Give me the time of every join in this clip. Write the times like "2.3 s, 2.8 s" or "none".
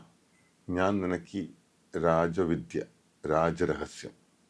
none